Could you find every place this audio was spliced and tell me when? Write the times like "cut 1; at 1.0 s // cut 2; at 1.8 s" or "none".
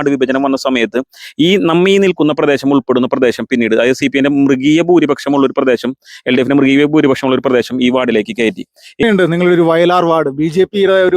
cut 1; at 9.0 s